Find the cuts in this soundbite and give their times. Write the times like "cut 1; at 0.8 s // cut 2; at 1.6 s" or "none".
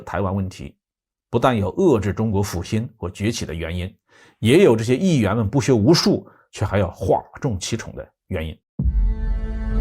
cut 1; at 8.6 s